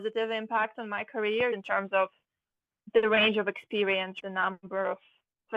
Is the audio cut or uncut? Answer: cut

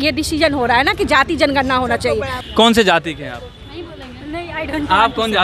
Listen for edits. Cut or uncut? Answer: cut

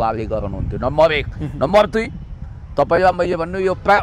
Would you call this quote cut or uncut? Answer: uncut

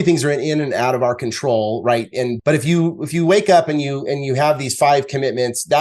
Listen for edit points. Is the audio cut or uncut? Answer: cut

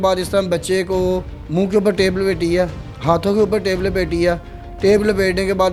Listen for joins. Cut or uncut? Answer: uncut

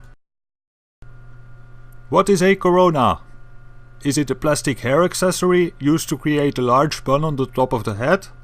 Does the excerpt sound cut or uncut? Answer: cut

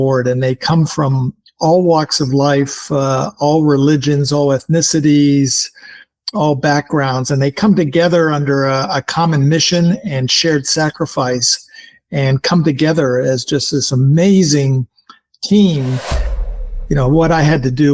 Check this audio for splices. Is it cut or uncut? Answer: cut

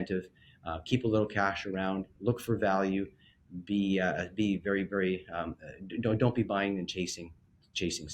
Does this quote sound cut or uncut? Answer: uncut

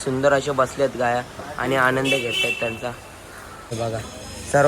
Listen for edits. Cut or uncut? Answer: cut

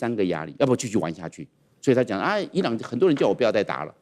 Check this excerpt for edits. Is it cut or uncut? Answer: uncut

